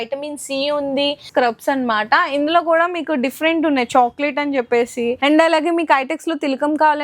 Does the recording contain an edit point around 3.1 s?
no; 2 cuts; at 1.2 s, 5.2 s

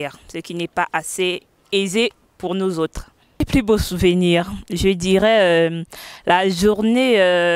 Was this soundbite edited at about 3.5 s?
yes; 1 cut; at 3.5 s

